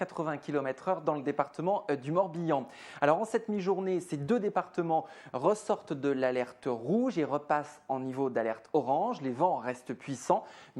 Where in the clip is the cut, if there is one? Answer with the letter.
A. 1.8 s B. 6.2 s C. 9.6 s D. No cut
A